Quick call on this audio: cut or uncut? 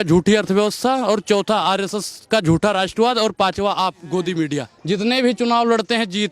cut